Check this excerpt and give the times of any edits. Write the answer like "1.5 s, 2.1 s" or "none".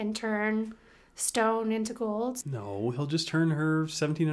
2.4 s